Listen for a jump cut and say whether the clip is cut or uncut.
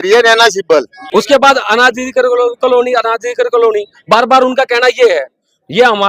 cut